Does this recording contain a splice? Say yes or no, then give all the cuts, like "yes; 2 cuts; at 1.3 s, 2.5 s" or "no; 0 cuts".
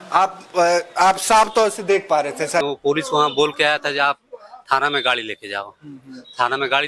yes; 1 cut; at 2.6 s